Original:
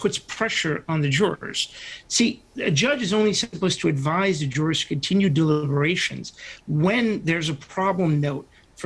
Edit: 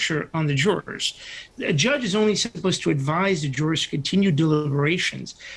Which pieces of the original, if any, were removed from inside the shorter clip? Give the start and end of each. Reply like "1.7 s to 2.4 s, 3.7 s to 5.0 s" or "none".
2.0 s to 2.5 s